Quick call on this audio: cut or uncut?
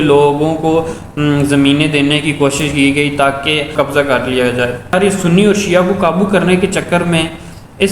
cut